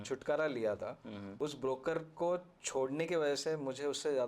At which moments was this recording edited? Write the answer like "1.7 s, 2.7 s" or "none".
1.2 s